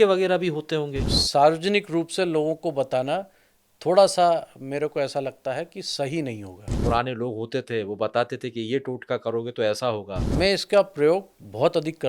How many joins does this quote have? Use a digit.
3